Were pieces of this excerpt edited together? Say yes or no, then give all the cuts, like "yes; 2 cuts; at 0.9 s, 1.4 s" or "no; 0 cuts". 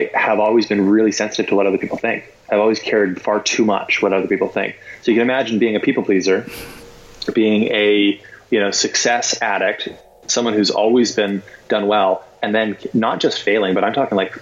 no; 0 cuts